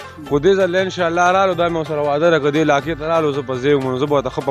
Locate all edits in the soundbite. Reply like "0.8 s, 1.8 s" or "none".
none